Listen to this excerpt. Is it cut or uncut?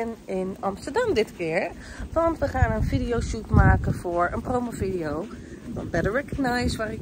uncut